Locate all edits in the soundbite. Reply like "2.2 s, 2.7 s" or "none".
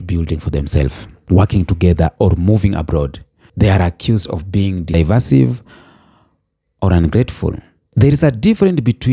4.9 s